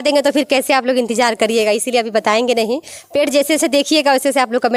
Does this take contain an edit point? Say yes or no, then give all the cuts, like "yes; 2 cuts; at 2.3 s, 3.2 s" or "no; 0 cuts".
no; 0 cuts